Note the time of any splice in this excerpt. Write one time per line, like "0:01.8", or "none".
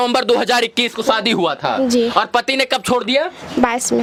none